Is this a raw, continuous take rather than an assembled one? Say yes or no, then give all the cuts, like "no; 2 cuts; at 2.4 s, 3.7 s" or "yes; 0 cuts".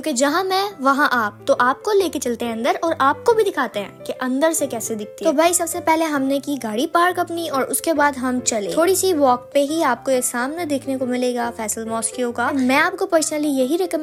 yes; 0 cuts